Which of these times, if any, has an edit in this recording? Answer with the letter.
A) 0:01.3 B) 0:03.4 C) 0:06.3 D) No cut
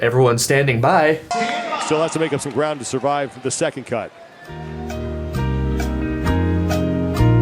A